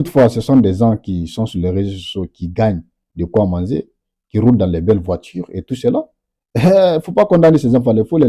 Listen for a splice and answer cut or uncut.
uncut